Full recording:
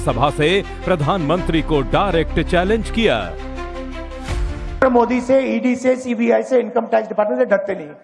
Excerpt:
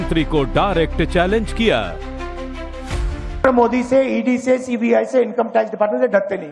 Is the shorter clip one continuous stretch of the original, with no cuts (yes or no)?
yes